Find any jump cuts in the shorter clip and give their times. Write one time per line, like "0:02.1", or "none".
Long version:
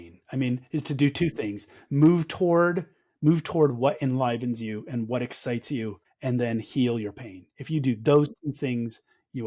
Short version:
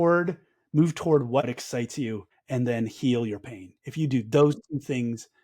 0:01.4